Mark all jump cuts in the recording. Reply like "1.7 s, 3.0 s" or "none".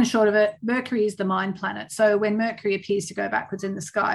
none

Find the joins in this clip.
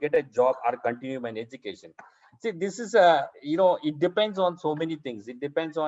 none

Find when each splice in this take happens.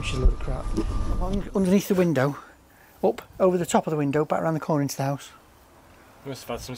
1.3 s

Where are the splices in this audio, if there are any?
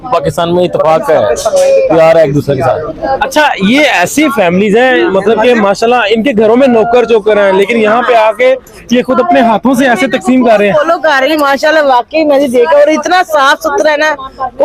none

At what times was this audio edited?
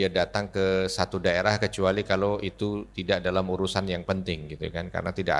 none

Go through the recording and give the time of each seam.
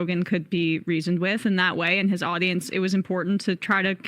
2.3 s

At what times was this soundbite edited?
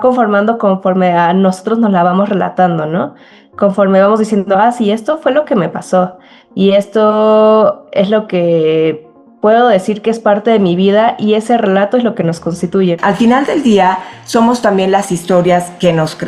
13.0 s

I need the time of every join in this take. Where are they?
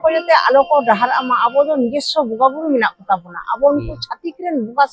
none

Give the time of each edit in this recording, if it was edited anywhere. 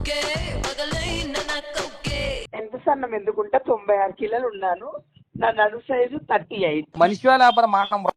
2.4 s

